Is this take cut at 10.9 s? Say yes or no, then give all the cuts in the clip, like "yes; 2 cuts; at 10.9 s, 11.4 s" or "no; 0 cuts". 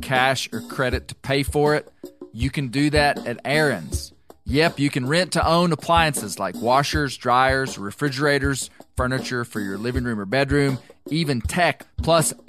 no; 0 cuts